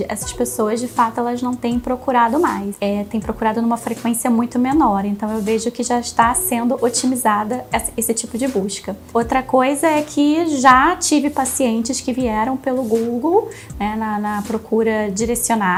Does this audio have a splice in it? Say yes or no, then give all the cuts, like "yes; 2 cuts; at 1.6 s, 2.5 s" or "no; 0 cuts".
no; 0 cuts